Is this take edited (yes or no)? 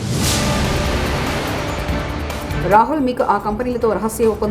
yes